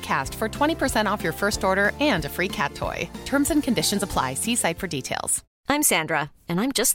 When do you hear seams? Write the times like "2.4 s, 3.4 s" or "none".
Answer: none

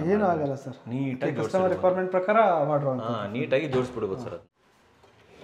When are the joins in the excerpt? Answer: 4.5 s

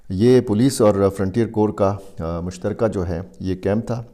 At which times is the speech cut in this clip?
none

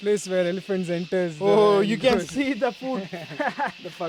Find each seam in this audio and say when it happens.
none

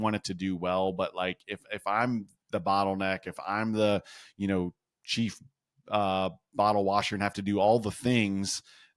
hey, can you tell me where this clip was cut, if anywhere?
none

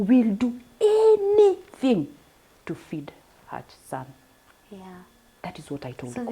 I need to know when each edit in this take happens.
none

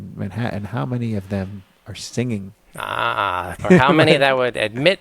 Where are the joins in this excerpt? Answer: 3.5 s

